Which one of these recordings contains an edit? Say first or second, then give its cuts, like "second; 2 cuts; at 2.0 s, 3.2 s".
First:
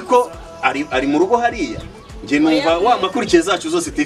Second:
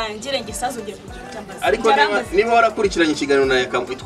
first; 1 cut; at 3.0 s